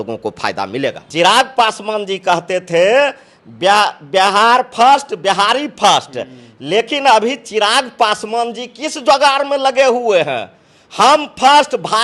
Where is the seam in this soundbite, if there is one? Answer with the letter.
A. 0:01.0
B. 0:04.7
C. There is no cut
A